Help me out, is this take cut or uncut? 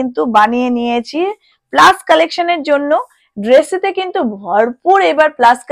uncut